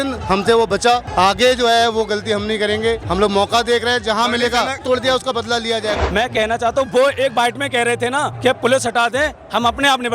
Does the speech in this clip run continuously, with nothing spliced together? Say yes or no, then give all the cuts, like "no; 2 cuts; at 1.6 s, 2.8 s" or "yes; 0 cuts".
no; 5 cuts; at 1.1 s, 3.0 s, 4.8 s, 5.9 s, 8.3 s